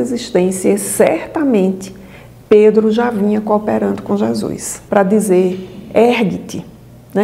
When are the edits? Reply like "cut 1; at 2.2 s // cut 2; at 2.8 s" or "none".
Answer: cut 1; at 4.7 s

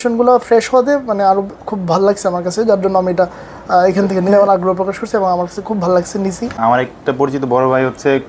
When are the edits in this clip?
cut 1; at 6.6 s

